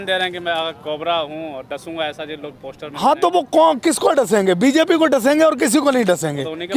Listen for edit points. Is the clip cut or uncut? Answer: uncut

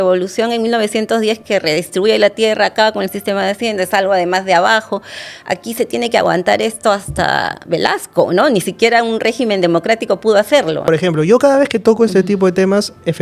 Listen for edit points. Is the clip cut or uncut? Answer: cut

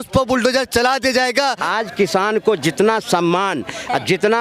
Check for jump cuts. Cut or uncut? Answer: cut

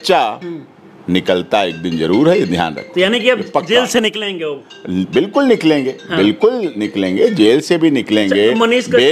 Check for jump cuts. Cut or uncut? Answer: uncut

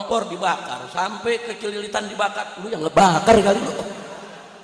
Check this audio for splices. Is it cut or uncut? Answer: uncut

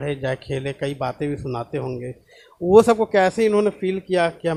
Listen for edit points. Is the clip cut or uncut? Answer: uncut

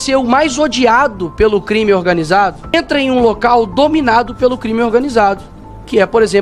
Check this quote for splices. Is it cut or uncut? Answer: cut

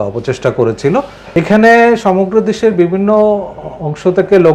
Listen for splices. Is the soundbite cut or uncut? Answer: cut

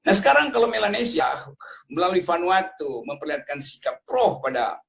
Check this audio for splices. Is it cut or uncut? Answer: cut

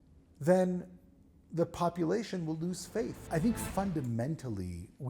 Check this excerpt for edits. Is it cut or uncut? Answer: cut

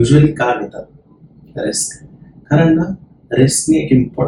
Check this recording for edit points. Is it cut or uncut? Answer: uncut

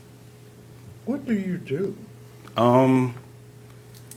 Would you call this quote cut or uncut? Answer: uncut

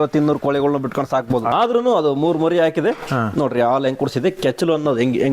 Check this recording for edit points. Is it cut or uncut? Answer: cut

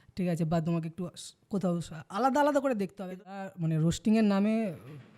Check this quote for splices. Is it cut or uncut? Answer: cut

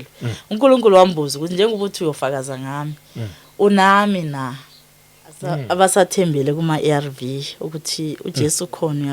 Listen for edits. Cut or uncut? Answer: cut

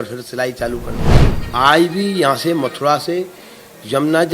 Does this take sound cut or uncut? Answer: cut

